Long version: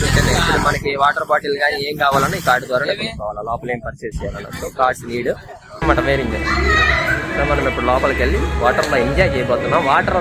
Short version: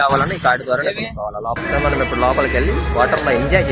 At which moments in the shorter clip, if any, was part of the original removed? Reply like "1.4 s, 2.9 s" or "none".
1.6 s